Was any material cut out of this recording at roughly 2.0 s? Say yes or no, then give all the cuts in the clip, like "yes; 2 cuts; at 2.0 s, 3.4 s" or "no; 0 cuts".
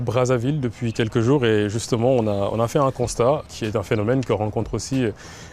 no; 1 cut; at 3.5 s